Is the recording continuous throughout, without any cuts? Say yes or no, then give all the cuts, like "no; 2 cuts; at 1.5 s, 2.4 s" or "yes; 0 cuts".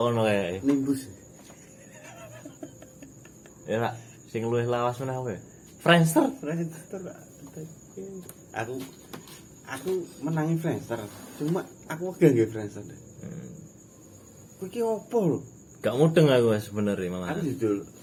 yes; 0 cuts